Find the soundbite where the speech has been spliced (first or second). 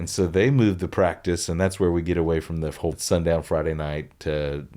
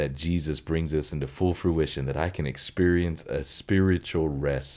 first